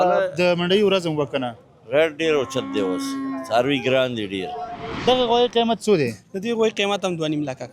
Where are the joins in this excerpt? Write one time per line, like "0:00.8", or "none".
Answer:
0:04.8